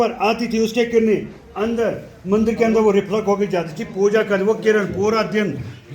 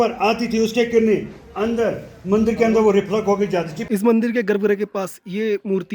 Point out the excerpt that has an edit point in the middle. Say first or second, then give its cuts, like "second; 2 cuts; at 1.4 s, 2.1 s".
second; 1 cut; at 3.8 s